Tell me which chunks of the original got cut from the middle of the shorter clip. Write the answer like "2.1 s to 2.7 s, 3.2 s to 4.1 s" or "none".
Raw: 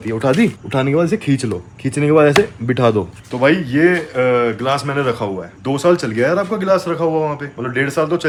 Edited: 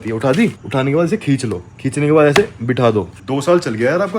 3.2 s to 5.5 s